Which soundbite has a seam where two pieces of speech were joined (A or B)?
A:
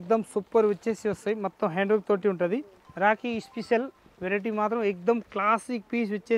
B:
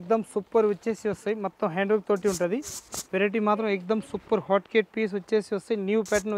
A